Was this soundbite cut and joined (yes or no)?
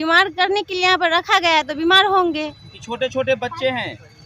no